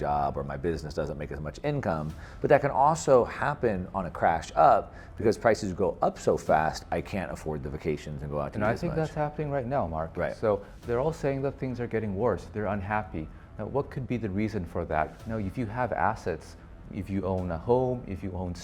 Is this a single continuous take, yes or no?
no